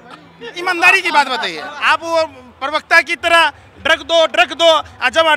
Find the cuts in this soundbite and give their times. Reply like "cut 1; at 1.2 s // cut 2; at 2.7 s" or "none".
cut 1; at 1.7 s